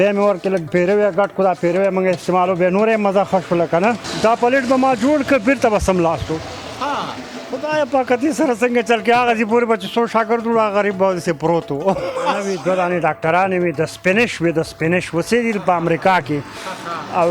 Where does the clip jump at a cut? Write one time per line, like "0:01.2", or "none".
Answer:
0:04.1
0:12.5